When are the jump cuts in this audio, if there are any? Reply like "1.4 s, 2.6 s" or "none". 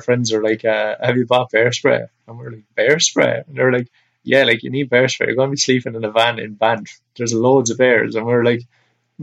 none